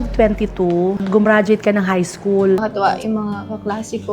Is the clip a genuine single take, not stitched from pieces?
no; 1 cut; at 2.6 s

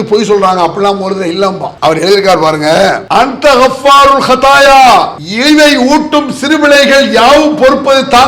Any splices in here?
yes; 3 cuts; at 1.7 s, 3.0 s, 5.2 s

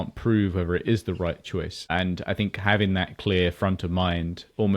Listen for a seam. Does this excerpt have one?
yes; 1 cut; at 1.8 s

